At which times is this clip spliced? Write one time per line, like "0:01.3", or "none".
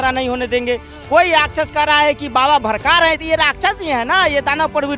none